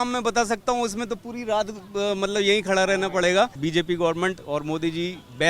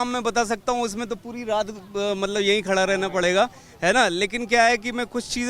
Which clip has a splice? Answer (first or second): first